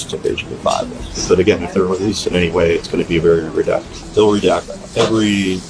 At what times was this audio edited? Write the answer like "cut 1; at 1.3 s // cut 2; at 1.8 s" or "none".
none